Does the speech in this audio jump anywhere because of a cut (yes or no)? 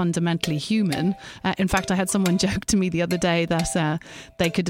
yes